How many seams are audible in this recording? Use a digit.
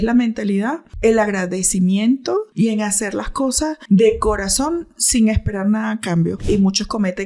4